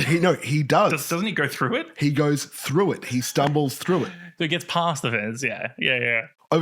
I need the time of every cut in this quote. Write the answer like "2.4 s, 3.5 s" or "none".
none